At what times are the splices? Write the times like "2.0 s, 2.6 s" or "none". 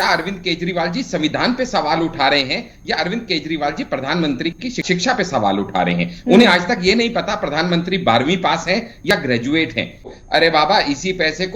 4.8 s, 10.1 s